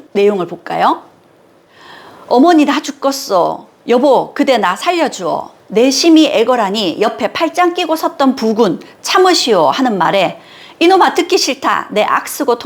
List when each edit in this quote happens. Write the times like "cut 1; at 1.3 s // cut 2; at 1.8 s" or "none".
none